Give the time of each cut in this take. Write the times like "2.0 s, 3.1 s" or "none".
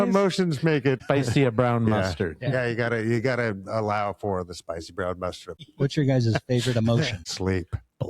1.0 s, 5.7 s, 7.2 s